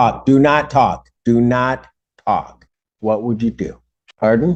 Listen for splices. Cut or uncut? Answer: uncut